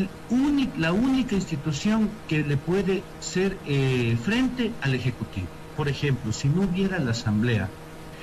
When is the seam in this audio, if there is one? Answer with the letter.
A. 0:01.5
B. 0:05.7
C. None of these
B